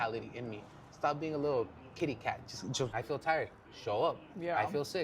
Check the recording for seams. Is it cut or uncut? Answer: cut